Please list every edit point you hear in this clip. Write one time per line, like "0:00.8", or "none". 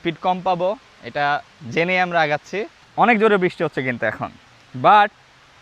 0:02.8